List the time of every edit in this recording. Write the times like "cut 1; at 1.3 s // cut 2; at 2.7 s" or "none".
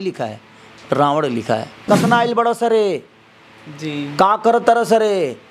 cut 1; at 1.7 s